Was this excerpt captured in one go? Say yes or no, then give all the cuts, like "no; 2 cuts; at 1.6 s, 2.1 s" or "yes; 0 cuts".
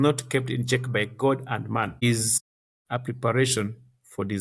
yes; 0 cuts